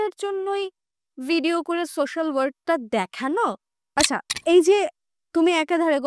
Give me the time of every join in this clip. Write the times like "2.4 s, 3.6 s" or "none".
3.9 s